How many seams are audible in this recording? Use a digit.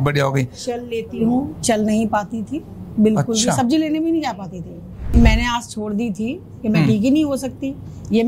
1